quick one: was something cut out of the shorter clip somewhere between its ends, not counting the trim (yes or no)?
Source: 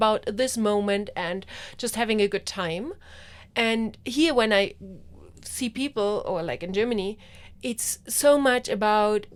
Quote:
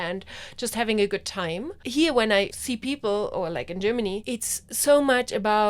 yes